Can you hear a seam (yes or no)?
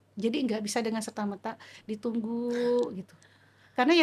no